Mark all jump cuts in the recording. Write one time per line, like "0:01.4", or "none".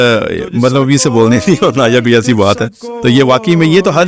none